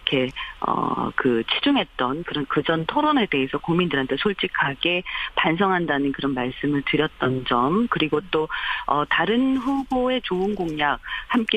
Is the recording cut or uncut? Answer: uncut